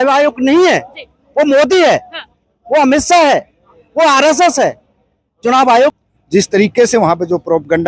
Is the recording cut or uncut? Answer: cut